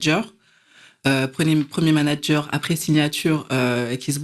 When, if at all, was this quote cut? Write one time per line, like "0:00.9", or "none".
none